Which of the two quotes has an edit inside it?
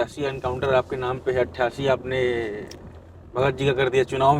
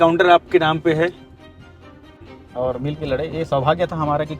second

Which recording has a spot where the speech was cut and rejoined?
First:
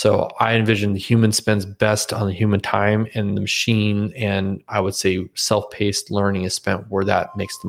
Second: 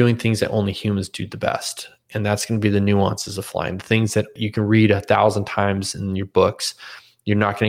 second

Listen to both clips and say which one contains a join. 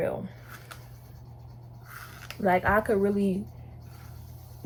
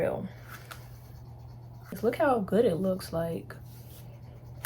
second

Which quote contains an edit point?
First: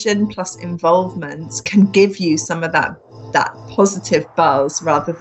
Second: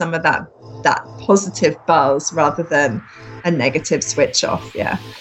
first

